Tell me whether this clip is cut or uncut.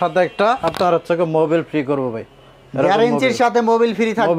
uncut